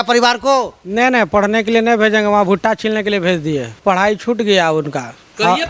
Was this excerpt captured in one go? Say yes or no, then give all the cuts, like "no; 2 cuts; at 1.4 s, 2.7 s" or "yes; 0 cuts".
no; 1 cut; at 3.8 s